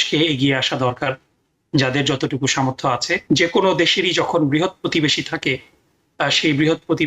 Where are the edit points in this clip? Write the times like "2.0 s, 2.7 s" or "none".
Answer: 3.2 s